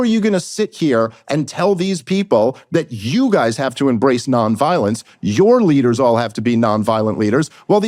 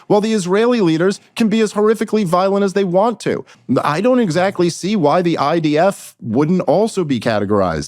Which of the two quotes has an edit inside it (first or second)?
second